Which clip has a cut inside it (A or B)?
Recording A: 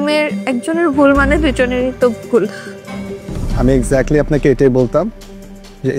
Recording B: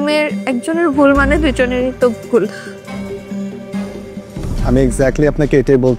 A